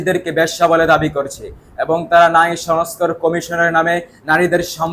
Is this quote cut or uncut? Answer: uncut